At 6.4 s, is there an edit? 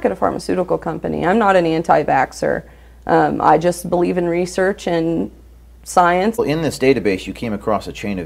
yes; 1 cut; at 6.4 s

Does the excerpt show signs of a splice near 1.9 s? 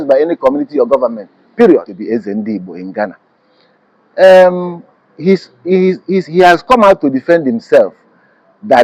yes; 1 cut; at 1.9 s

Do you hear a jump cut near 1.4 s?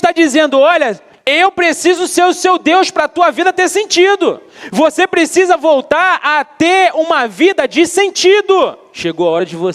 no; 2 cuts; at 4.5 s, 8.9 s

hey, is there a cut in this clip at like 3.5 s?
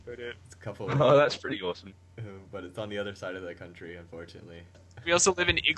no; 1 cut; at 4.8 s

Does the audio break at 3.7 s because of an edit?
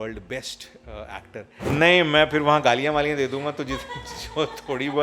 no; 1 cut; at 1.7 s

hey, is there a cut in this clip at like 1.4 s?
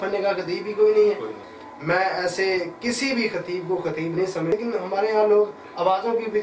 yes; 2 cuts; at 1.4 s, 4.5 s

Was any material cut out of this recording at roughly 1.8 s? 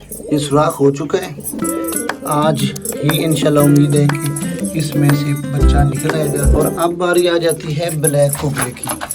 no; 1 cut; at 6.5 s

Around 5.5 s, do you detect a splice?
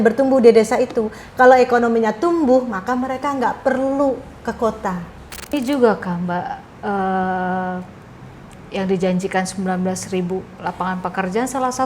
yes; 1 cut; at 5.5 s

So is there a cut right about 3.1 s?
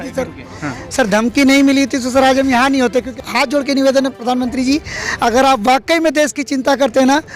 yes; 1 cut; at 3.1 s

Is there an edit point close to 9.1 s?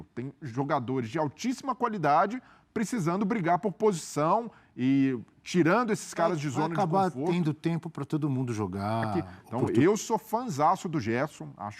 yes; 1 cut; at 9.1 s

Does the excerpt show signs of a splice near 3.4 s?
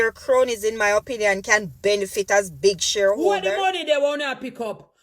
yes; 1 cut; at 3.4 s

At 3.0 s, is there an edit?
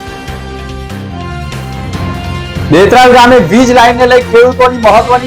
no; 1 cut; at 1.4 s

